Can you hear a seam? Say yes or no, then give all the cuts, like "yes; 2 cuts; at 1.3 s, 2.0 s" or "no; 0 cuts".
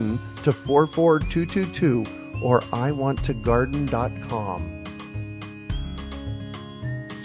yes; 1 cut; at 4.6 s